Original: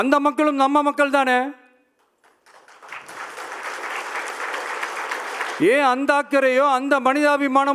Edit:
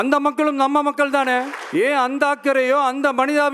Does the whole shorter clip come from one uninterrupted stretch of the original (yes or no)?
no